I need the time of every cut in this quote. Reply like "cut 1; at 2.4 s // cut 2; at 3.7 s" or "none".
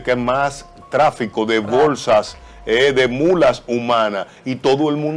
none